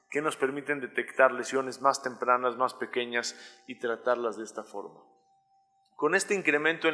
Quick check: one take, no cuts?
yes; 0 cuts

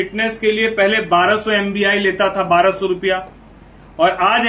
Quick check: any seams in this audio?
no; 0 cuts

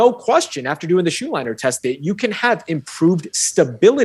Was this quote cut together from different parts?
no; 0 cuts

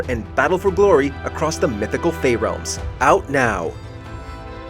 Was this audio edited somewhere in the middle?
yes; 1 cut; at 3.7 s

